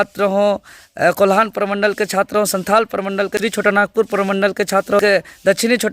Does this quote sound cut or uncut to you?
cut